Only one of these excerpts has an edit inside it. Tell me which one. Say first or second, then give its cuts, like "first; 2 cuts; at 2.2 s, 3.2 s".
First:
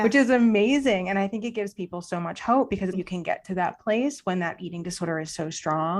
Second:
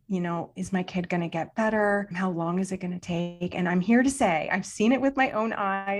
first; 1 cut; at 3.0 s